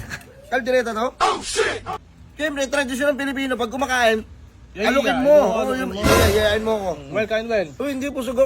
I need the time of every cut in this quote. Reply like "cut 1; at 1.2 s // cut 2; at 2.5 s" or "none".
cut 1; at 1.9 s